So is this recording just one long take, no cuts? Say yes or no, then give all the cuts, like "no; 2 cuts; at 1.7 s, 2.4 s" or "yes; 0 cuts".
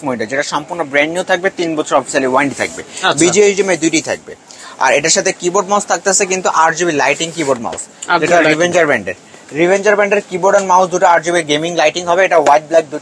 yes; 0 cuts